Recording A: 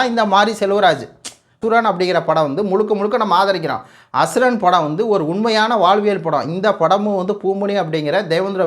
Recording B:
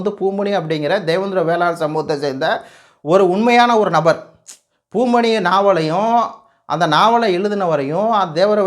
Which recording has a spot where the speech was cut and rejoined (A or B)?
A